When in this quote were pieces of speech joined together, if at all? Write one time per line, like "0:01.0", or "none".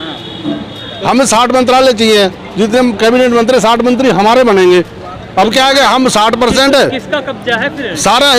none